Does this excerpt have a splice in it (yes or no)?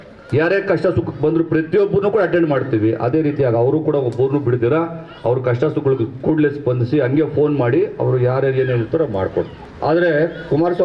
yes